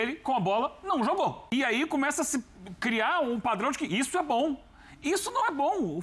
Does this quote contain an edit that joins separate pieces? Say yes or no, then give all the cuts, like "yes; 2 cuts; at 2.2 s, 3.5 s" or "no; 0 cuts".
yes; 1 cut; at 1.4 s